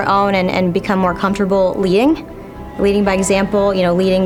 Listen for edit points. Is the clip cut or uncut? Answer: uncut